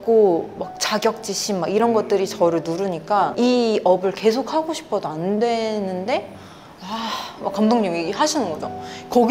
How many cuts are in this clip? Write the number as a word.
one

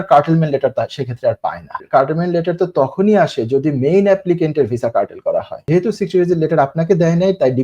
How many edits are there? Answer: two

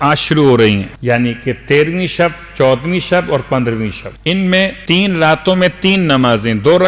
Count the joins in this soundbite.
three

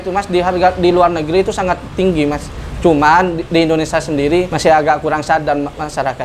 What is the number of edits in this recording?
two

